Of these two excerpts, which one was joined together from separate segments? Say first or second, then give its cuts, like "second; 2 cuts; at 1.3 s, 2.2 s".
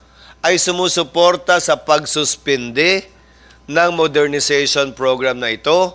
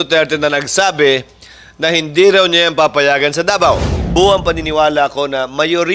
second; 1 cut; at 3.9 s